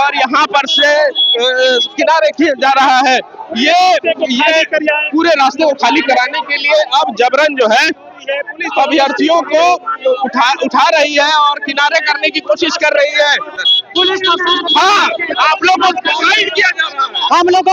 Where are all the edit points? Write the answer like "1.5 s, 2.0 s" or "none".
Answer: none

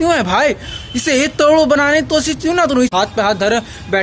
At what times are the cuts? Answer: 2.9 s

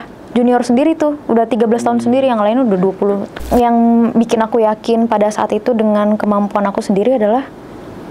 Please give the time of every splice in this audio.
3.5 s

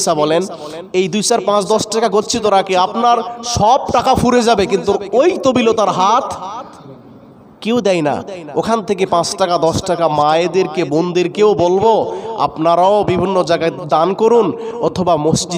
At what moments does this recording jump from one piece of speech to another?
13.8 s

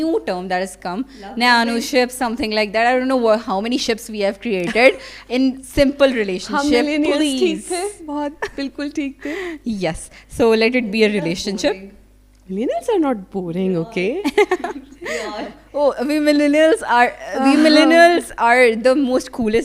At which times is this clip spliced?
none

